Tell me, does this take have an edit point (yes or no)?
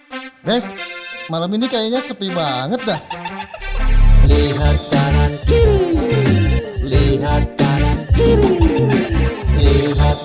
no